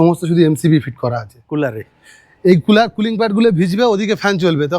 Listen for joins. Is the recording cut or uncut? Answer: cut